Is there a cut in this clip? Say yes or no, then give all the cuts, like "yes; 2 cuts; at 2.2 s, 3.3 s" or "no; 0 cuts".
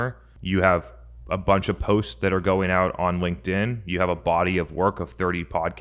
no; 0 cuts